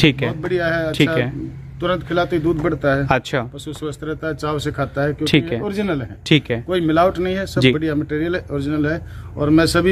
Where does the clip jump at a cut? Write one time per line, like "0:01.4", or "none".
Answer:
none